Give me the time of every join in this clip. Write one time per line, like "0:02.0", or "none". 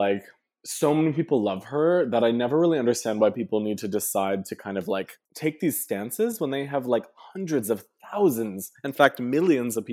0:05.2